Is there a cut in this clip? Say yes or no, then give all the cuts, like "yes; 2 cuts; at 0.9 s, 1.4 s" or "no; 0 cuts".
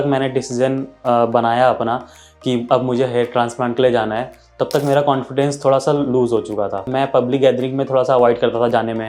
yes; 1 cut; at 6.9 s